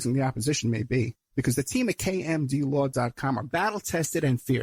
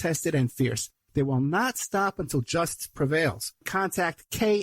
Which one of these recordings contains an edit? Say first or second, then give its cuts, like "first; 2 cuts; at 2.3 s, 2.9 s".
second; 1 cut; at 3.6 s